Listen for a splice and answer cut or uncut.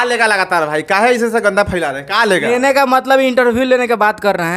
uncut